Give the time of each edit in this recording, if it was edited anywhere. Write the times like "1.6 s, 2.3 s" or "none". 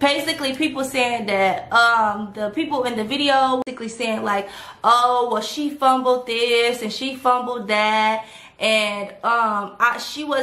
3.6 s